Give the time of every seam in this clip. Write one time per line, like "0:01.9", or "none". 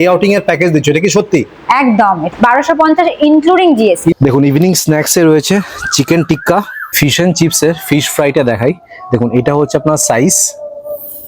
0:02.2
0:04.2
0:06.8

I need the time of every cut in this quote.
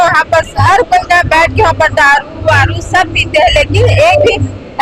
none

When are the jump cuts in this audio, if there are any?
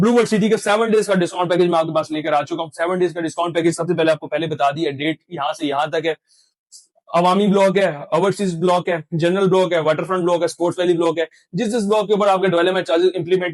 none

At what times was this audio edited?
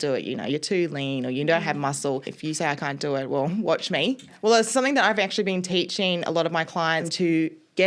0:02.3
0:04.3
0:07.1

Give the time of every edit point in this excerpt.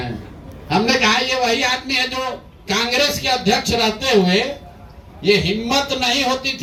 none

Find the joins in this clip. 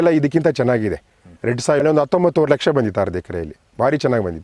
0:01.8

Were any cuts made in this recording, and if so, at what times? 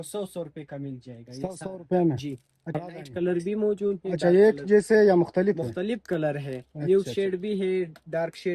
0:02.8

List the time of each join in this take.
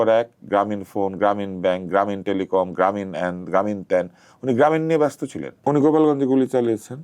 0:05.5

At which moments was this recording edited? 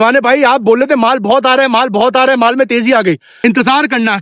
0:03.3

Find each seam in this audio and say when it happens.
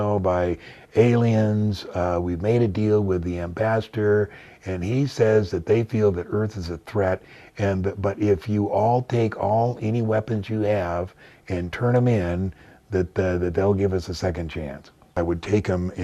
0:15.0

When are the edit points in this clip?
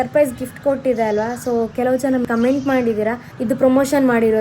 0:02.2
0:03.3

